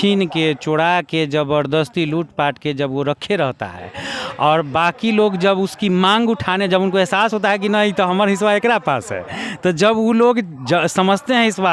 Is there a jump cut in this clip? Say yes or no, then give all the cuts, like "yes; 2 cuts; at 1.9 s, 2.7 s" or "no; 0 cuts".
no; 0 cuts